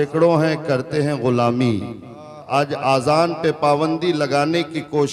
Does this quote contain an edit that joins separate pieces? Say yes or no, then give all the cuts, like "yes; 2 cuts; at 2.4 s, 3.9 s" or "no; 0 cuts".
yes; 1 cut; at 2.4 s